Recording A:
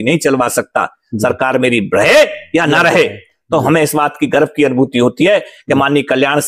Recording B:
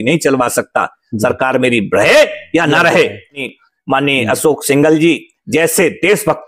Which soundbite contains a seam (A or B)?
B